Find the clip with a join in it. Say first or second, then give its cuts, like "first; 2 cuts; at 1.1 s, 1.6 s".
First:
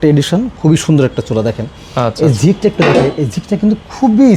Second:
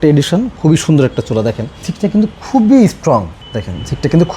second; 2 cuts; at 1.8 s, 3.4 s